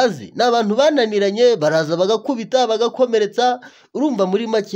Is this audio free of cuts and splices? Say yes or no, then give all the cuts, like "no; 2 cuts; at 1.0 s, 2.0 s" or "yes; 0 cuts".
yes; 0 cuts